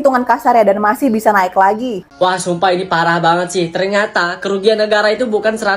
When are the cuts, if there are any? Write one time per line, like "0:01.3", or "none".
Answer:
0:02.0